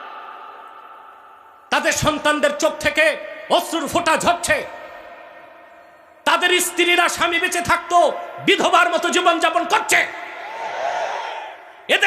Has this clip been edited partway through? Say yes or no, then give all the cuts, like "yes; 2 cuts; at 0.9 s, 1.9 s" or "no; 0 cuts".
no; 0 cuts